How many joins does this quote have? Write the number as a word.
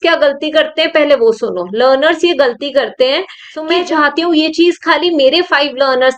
one